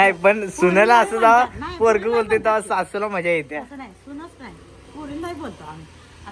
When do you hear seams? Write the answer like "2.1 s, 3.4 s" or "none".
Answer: none